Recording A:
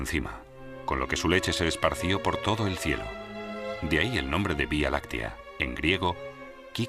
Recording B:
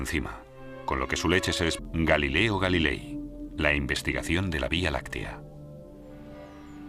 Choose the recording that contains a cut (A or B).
A